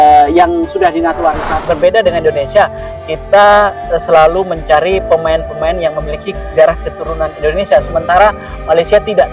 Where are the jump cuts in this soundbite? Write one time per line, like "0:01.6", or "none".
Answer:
0:01.5